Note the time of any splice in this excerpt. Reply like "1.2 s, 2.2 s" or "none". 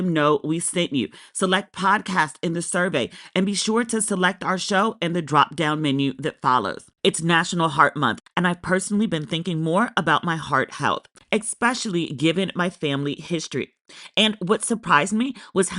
6.8 s